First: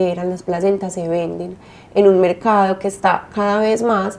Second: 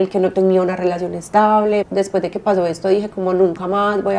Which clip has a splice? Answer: second; 1 cut; at 1.9 s

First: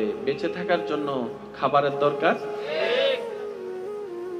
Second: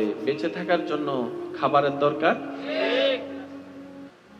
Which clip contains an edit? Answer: first; 1 cut; at 3.2 s

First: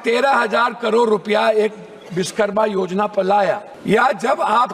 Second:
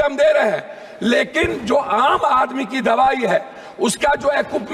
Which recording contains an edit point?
first; 1 cut; at 3.7 s

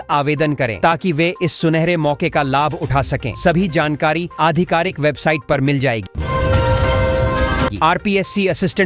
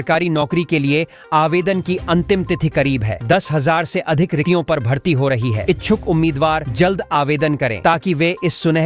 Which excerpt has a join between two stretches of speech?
first; 2 cuts; at 6.1 s, 7.7 s

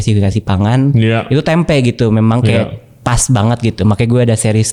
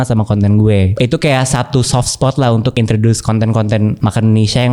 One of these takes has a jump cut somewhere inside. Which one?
second; 3 cuts; at 0.9 s, 2.7 s, 4.0 s

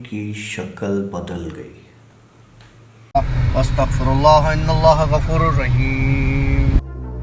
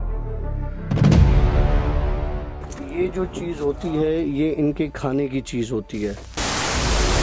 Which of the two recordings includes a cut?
first; 1 cut; at 2.9 s

